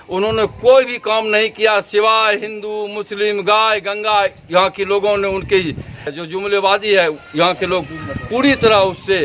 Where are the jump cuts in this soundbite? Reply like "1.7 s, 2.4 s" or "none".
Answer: 6.2 s